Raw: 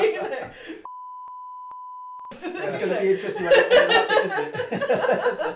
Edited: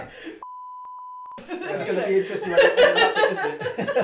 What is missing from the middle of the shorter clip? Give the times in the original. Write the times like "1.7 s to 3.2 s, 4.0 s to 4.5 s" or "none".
1.4 s to 1.9 s